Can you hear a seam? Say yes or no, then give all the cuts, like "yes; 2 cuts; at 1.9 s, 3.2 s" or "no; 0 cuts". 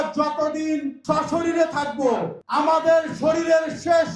yes; 2 cuts; at 0.9 s, 2.6 s